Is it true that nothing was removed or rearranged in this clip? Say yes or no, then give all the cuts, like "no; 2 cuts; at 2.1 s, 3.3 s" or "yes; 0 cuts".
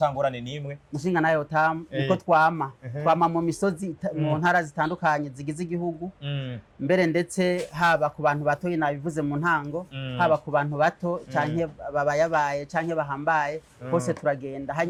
yes; 0 cuts